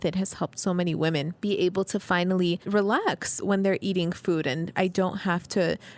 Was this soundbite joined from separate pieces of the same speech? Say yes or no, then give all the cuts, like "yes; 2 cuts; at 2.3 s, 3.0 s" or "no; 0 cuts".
yes; 3 cuts; at 1.3 s, 2.6 s, 4.7 s